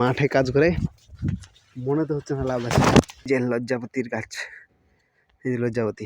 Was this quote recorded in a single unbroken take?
no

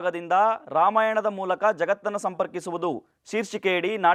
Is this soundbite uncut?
yes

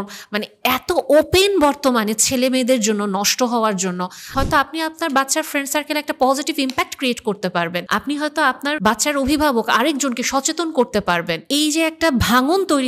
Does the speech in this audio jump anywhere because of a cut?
yes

